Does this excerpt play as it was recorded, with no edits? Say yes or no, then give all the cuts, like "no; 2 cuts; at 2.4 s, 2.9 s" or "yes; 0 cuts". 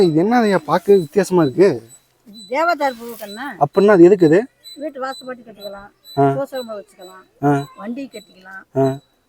yes; 0 cuts